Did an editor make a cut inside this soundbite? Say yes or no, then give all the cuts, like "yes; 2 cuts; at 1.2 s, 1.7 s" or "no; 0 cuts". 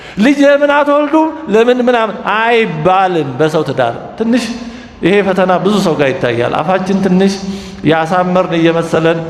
no; 0 cuts